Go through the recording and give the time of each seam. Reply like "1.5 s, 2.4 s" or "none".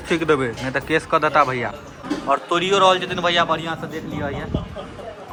none